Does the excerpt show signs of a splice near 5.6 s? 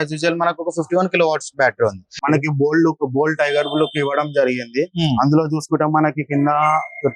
no; 1 cut; at 2.1 s

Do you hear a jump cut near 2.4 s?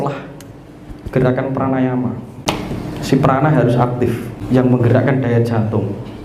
yes; 2 cuts; at 2.4 s, 4.3 s

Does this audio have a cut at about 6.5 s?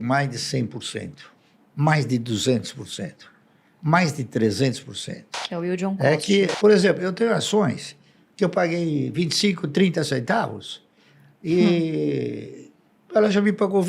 yes; 2 cuts; at 5.4 s, 6.5 s

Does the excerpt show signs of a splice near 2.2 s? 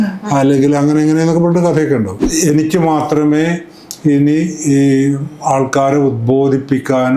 yes; 1 cut; at 2.2 s

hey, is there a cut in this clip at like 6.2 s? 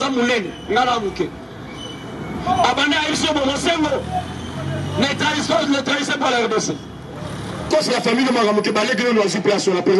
no; 1 cut; at 7.7 s

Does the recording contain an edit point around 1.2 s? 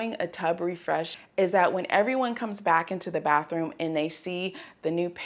yes; 1 cut; at 1.2 s

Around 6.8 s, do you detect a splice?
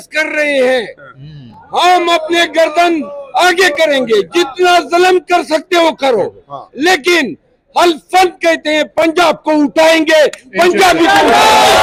no; 0 cuts

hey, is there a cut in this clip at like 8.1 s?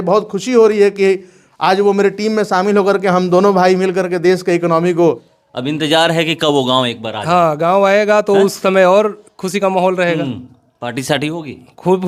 no; 1 cut; at 5.3 s

